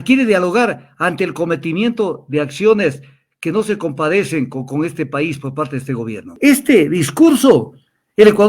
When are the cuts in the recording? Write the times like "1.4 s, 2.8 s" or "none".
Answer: 6.3 s